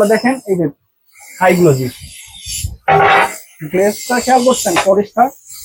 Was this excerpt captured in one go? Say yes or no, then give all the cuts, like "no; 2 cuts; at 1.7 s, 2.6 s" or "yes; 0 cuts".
yes; 0 cuts